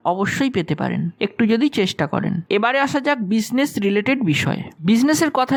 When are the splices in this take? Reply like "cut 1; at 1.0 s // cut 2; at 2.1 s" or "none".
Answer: none